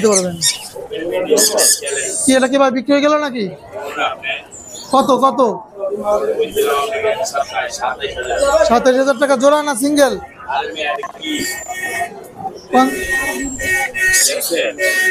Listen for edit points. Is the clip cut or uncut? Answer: uncut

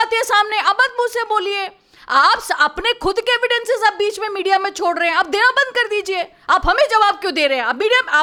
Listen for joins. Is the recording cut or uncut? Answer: uncut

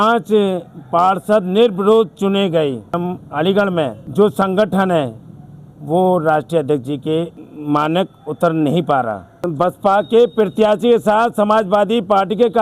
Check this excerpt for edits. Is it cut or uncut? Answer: cut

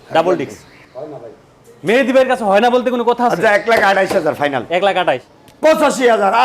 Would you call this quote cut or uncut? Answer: cut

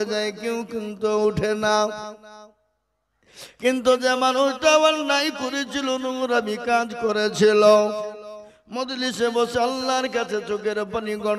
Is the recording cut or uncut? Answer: uncut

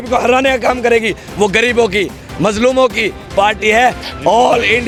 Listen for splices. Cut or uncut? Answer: uncut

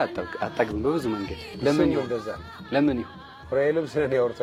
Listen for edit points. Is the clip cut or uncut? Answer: uncut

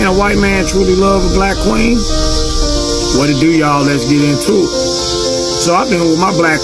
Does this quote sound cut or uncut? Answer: uncut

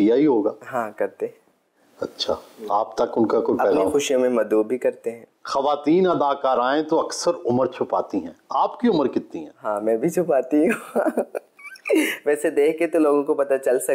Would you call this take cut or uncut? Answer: uncut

